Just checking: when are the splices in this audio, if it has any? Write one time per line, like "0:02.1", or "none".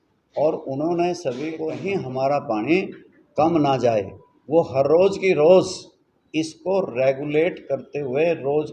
0:01.7